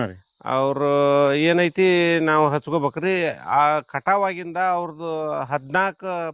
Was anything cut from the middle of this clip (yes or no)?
no